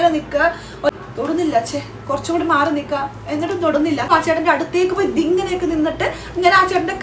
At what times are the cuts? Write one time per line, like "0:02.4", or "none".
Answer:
0:00.9
0:04.1